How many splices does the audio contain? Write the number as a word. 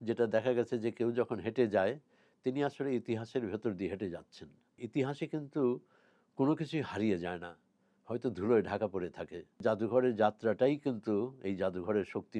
two